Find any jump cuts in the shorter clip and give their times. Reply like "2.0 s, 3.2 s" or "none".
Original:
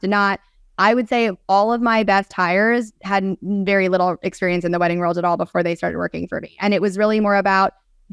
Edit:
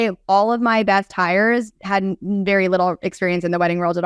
none